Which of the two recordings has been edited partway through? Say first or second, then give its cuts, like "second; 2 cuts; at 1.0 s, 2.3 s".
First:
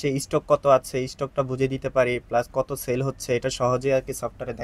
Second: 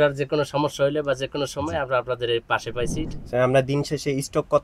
second; 1 cut; at 3.0 s